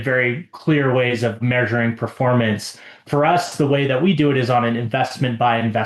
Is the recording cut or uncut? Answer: cut